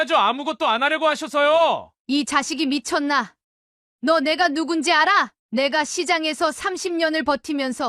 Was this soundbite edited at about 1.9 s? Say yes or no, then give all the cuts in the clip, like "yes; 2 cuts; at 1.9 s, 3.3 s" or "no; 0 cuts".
yes; 2 cuts; at 1.9 s, 5.4 s